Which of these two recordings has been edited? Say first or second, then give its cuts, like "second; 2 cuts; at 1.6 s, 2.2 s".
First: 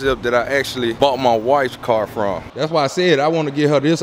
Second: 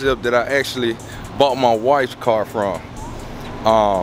first; 2 cuts; at 0.9 s, 2.5 s